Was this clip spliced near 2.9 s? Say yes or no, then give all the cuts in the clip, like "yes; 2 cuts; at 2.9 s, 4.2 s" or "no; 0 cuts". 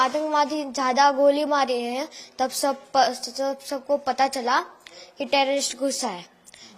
no; 0 cuts